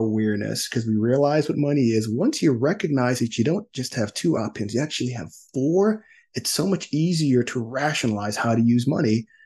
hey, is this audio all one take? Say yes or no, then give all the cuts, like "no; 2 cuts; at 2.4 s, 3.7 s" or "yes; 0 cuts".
yes; 0 cuts